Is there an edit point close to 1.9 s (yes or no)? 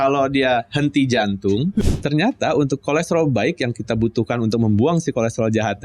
yes